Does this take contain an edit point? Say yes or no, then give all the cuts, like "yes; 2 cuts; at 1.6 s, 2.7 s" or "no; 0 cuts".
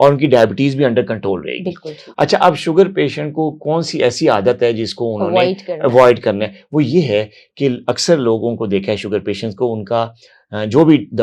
no; 0 cuts